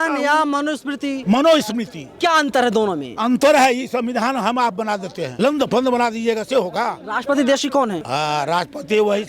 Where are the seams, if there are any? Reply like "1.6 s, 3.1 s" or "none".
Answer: 1.2 s, 2.0 s, 5.2 s, 7.1 s, 8.0 s